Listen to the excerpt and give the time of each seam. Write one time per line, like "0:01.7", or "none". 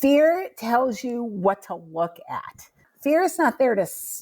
0:02.9

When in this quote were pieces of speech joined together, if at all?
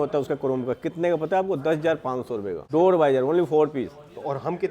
0:02.6

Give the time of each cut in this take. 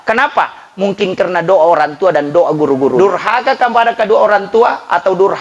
0:03.0

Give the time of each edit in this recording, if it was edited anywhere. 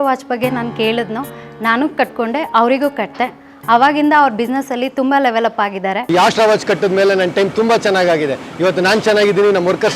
0:06.0

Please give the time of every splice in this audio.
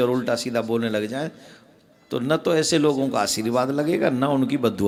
none

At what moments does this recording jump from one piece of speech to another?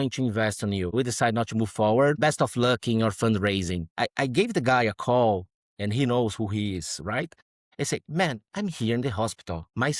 none

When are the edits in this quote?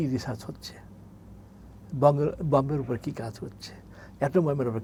none

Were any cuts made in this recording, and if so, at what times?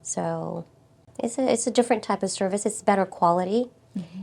0:01.0

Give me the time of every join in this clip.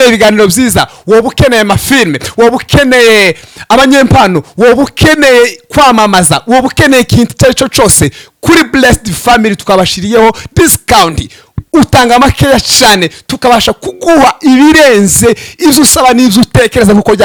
none

